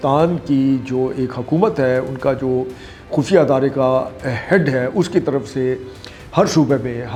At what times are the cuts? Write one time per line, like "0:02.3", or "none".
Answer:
none